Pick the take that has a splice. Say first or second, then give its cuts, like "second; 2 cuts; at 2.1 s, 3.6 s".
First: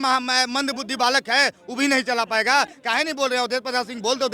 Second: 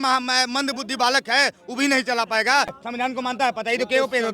second; 1 cut; at 2.8 s